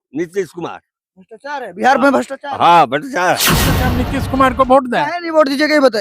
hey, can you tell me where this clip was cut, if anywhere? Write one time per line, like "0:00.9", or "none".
0:03.9